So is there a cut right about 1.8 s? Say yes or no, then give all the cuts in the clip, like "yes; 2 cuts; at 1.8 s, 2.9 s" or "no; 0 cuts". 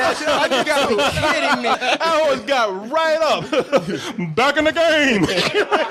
yes; 1 cut; at 1.8 s